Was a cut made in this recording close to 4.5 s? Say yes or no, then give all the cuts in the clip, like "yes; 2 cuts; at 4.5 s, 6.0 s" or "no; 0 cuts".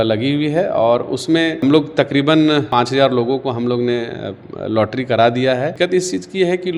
no; 2 cuts; at 2.7 s, 5.7 s